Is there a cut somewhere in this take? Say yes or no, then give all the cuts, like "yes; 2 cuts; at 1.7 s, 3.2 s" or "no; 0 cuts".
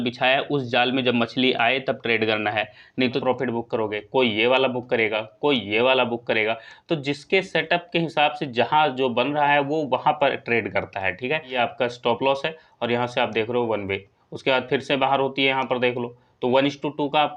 yes; 2 cuts; at 3.2 s, 11.5 s